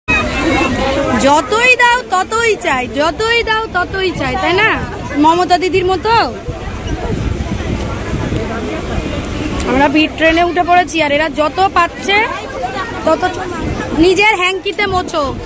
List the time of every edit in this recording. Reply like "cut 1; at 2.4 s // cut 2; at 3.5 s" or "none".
none